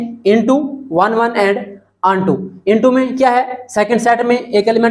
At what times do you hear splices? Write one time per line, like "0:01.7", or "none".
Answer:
none